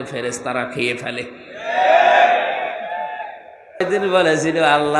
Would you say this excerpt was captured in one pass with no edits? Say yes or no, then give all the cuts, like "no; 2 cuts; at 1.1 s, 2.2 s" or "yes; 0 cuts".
no; 1 cut; at 3.9 s